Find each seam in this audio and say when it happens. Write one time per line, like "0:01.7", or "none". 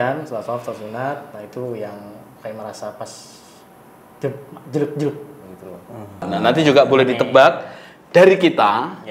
0:06.2